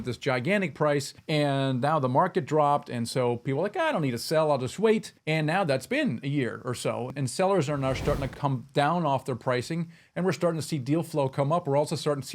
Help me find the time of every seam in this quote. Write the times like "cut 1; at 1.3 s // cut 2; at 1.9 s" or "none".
cut 1; at 1.2 s // cut 2; at 7.1 s // cut 3; at 8.3 s